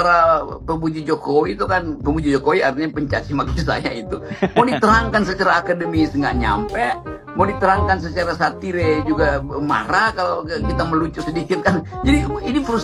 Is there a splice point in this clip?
no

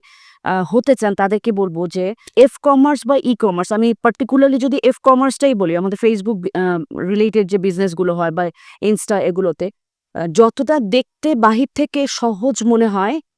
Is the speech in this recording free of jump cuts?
no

